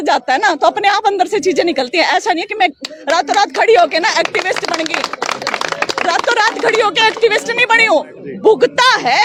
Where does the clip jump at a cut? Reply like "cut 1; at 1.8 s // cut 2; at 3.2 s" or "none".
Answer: none